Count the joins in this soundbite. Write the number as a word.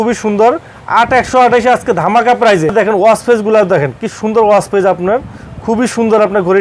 one